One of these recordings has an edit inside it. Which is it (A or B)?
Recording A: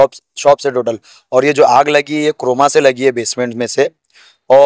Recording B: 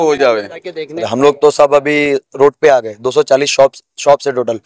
B